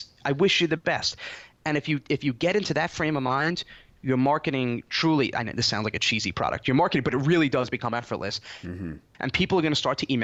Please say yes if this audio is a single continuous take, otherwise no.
yes